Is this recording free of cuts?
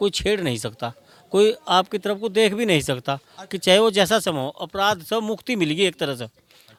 yes; 0 cuts

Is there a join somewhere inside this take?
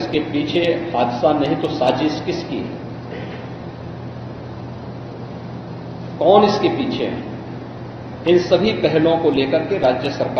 no; 0 cuts

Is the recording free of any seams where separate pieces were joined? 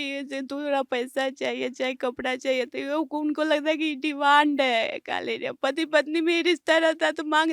yes; 0 cuts

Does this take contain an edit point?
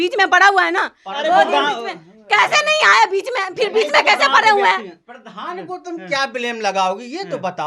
no; 0 cuts

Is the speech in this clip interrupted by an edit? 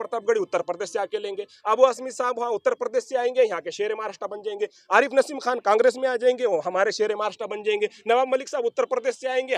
no; 0 cuts

